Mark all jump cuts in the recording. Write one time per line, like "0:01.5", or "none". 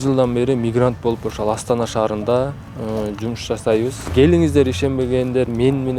0:04.1